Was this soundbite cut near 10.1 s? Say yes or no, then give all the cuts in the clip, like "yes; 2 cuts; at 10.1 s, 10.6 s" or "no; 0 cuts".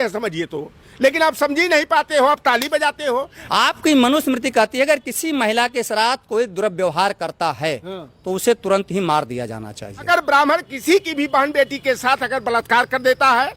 yes; 2 cuts; at 3.4 s, 10.1 s